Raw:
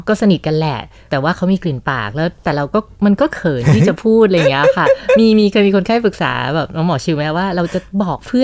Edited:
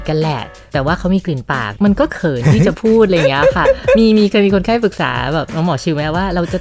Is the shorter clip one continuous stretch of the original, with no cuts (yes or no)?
no